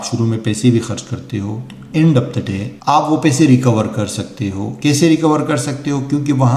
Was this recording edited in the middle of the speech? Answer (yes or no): no